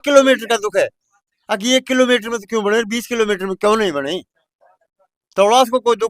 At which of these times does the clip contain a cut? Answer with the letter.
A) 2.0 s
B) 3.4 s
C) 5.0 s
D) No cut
D